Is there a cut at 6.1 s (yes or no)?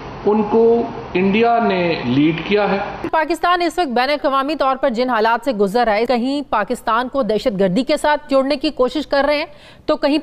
yes